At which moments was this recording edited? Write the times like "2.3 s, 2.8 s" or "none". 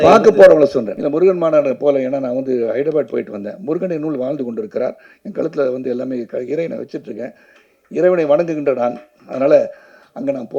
0.9 s